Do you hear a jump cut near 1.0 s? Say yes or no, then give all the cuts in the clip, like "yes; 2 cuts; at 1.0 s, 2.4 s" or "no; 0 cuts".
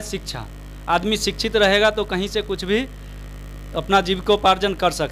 no; 0 cuts